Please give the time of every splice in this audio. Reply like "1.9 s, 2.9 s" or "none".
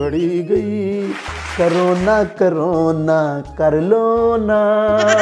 1.4 s